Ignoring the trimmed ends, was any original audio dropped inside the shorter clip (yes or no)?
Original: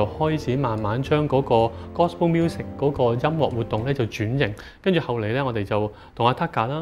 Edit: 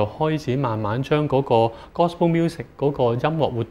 no